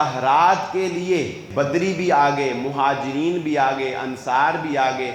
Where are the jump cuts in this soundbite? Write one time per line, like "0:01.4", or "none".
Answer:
0:01.4